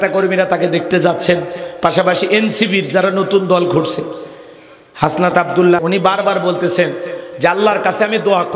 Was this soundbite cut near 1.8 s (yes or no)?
no